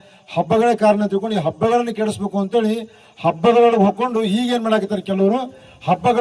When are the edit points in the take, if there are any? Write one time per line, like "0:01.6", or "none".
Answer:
none